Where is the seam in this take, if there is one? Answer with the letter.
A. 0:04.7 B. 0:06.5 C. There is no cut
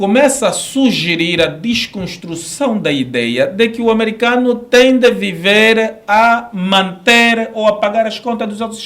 C